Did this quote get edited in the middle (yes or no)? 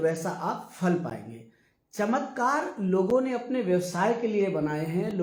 no